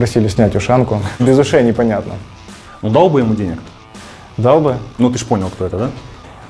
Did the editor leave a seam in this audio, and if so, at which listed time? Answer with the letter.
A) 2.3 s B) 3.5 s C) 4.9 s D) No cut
C